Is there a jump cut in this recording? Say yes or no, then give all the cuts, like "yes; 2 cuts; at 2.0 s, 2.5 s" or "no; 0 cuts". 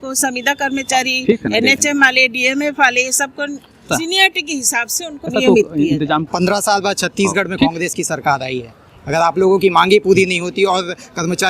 yes; 3 cuts; at 3.8 s, 5.3 s, 6.3 s